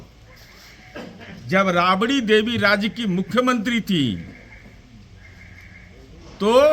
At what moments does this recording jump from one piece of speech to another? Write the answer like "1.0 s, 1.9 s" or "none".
none